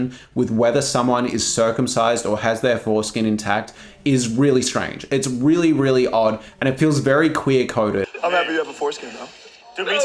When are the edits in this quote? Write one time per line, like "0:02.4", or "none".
none